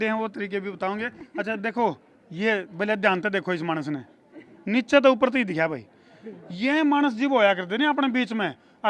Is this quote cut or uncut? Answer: uncut